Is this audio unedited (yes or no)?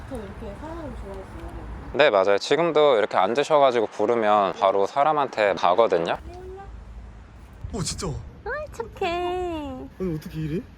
no